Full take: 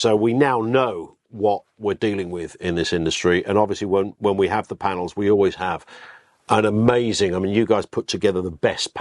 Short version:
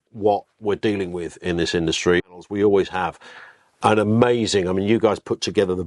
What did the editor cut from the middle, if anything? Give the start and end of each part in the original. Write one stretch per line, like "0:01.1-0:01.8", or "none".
0:03.5-0:04.9